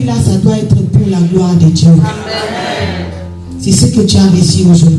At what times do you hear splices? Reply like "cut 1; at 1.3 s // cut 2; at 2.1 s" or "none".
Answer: none